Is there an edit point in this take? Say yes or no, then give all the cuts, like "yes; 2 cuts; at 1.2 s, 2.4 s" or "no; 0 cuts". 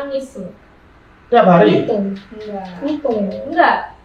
no; 0 cuts